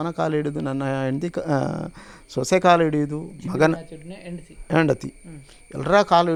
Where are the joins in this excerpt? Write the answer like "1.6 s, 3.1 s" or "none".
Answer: none